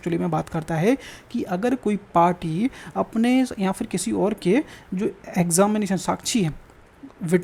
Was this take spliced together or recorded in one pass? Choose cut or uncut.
uncut